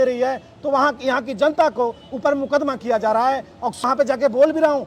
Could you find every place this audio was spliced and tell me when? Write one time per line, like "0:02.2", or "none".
0:03.8